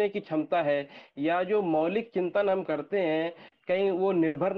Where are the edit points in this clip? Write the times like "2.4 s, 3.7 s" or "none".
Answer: none